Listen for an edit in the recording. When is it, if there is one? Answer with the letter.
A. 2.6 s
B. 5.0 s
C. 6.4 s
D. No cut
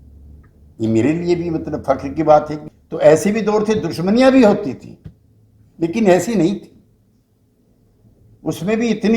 A